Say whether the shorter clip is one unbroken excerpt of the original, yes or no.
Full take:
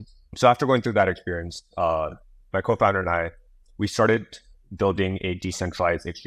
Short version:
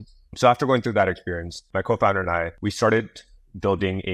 no